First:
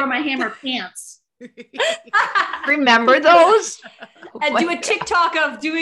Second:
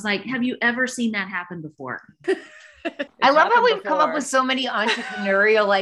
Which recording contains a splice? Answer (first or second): second